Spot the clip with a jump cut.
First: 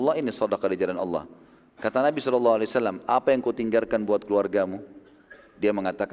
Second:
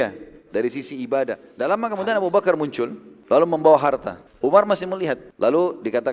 second; 4 cuts; at 1.5 s, 3.1 s, 4.2 s, 5.3 s

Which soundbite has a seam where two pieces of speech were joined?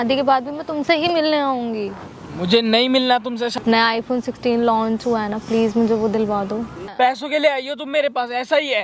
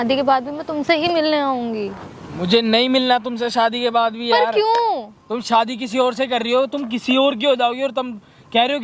first; 2 cuts; at 3.5 s, 6.8 s

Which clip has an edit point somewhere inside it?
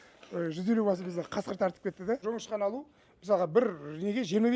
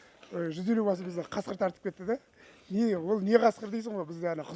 first; 1 cut; at 2.2 s

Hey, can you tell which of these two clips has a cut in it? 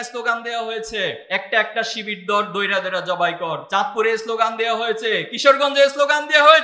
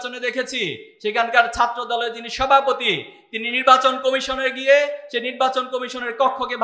first; 2 cuts; at 1.2 s, 3.6 s

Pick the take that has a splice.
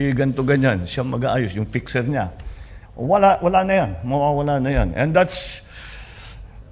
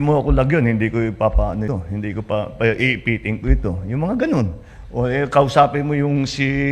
second; 1 cut; at 1.7 s

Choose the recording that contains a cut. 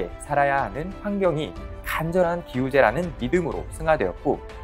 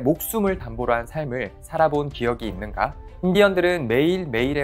second; 1 cut; at 3.0 s

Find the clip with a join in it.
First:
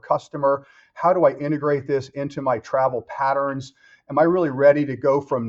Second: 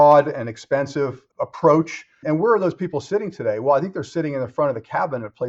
second; 1 cut; at 2.2 s

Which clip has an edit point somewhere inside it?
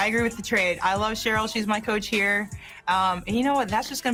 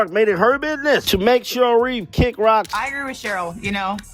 second; 1 cut; at 2.8 s

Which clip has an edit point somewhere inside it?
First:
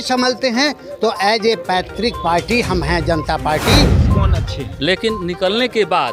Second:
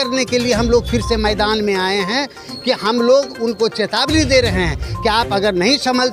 first; 1 cut; at 4.1 s

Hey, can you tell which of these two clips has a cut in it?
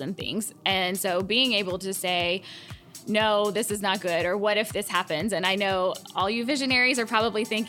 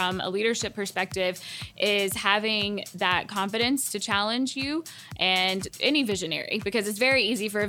second; 1 cut; at 5.7 s

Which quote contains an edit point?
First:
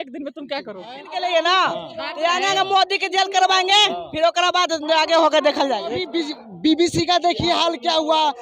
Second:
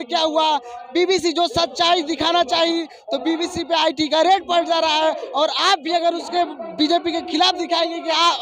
first; 2 cuts; at 1.1 s, 6.0 s

